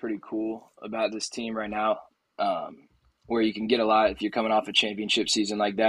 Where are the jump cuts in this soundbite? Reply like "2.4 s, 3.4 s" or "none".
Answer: none